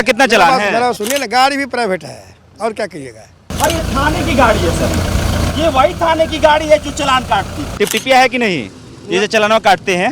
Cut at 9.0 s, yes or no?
no